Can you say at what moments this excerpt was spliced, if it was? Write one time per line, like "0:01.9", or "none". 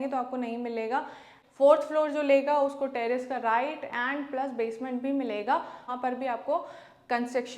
0:01.3
0:05.9